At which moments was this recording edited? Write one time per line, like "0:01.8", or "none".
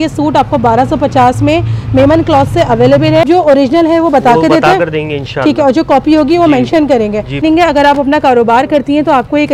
0:03.3
0:07.4